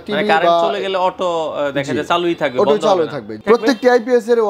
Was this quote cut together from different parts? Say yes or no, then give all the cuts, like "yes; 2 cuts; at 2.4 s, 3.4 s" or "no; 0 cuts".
yes; 1 cut; at 3.4 s